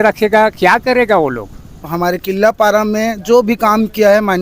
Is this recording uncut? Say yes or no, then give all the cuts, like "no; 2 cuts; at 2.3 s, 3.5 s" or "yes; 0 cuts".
no; 1 cut; at 1.8 s